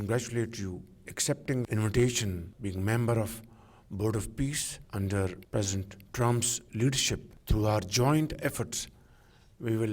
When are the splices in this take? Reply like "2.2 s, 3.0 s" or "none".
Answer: 1.1 s, 2.5 s, 4.7 s, 7.3 s